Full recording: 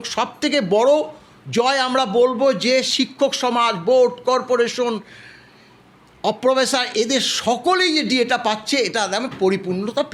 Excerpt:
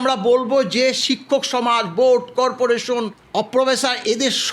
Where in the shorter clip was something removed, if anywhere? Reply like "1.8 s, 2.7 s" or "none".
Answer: 3.2 s